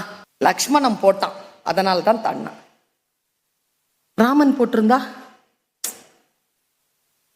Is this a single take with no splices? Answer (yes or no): yes